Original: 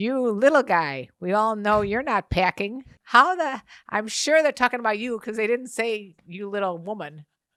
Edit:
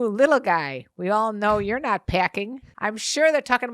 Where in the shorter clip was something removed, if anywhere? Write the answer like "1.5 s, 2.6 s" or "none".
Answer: 2.6 s